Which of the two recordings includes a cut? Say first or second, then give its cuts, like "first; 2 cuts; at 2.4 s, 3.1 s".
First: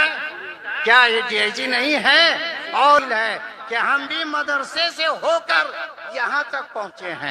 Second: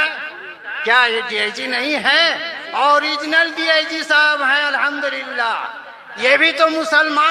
first; 1 cut; at 3.0 s